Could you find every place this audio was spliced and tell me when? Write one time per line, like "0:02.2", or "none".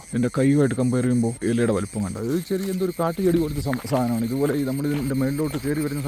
none